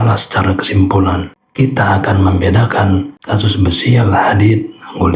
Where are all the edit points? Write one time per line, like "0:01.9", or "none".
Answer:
0:03.2